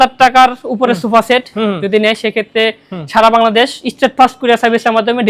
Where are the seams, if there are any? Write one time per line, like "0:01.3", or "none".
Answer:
none